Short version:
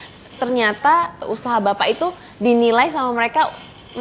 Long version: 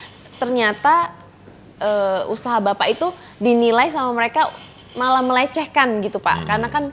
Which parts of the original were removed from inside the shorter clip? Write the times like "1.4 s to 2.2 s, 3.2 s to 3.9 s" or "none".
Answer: 1.2 s to 2.2 s